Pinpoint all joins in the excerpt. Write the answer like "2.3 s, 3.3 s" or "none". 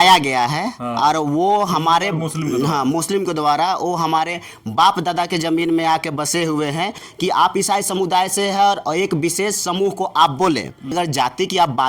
7.0 s, 10.9 s

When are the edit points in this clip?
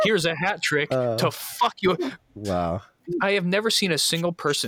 2.9 s

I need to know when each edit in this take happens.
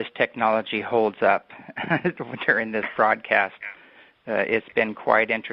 3.6 s

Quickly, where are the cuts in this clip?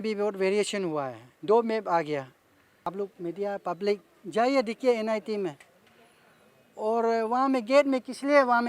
2.9 s

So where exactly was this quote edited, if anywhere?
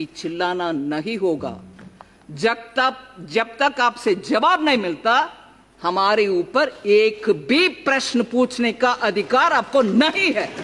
none

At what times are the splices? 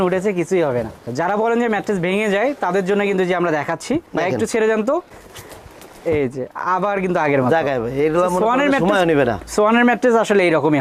none

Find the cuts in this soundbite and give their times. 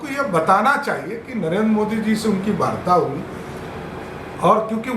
none

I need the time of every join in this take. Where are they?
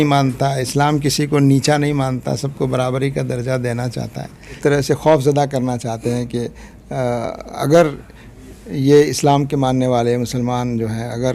4.6 s

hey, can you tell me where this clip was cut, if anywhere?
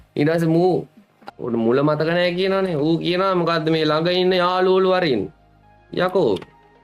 1.2 s

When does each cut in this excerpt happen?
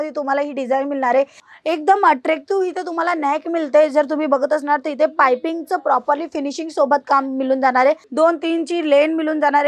1.4 s, 8.1 s

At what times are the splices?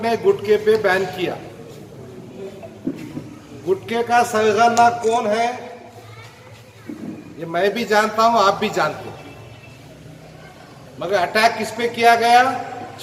none

